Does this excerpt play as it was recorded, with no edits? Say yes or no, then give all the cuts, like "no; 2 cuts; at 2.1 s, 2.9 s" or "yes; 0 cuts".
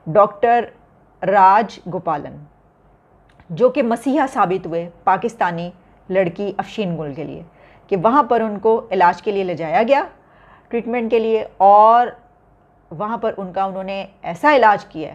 yes; 0 cuts